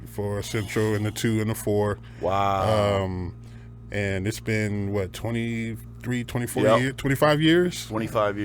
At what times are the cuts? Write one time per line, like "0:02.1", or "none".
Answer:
none